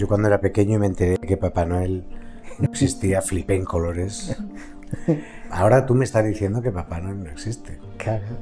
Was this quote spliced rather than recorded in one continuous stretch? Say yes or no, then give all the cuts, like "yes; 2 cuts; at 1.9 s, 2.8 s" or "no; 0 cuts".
yes; 1 cut; at 5.4 s